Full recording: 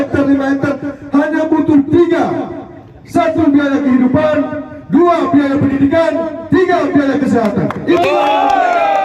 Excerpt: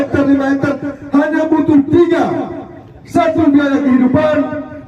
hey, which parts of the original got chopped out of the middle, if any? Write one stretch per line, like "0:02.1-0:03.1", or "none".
none